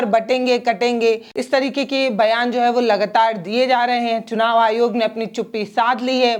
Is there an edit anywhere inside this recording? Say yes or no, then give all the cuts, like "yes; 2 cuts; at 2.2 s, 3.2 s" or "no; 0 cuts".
yes; 1 cut; at 1.3 s